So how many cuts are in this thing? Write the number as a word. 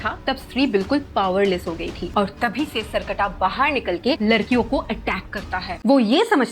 two